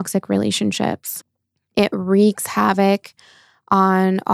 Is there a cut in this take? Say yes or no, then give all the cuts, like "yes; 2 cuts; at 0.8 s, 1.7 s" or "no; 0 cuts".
yes; 1 cut; at 1.1 s